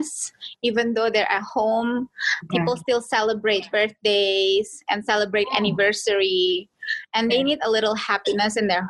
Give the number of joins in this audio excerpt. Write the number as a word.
zero